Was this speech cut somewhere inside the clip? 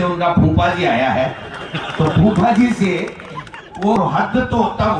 yes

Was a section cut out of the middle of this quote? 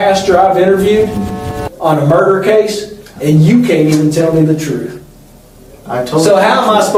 no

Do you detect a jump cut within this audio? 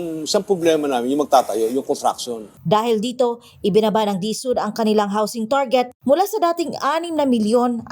yes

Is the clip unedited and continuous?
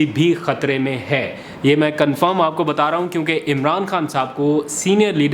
yes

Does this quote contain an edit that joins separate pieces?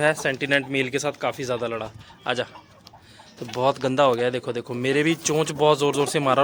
no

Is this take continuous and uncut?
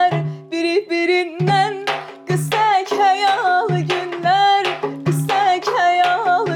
yes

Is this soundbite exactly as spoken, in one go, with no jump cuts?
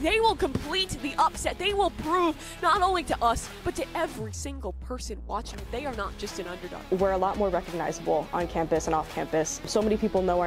no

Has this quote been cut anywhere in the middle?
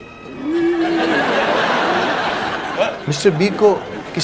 yes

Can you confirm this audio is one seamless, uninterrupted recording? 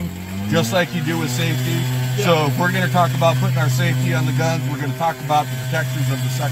yes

